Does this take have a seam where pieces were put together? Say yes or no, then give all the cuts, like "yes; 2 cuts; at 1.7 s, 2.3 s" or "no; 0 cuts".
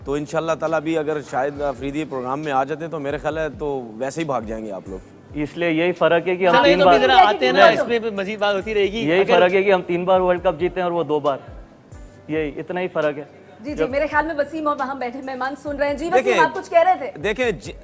no; 0 cuts